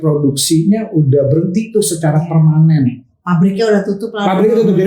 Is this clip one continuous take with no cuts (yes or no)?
yes